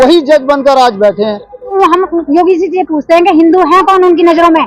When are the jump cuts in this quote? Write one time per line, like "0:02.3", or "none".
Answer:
0:01.6